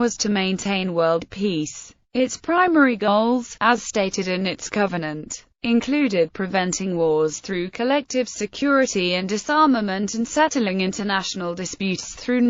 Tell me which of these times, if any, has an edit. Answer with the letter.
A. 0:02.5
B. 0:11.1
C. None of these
B